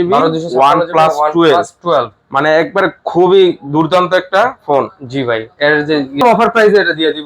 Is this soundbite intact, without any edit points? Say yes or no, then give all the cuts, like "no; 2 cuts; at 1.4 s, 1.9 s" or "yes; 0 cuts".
no; 1 cut; at 6.2 s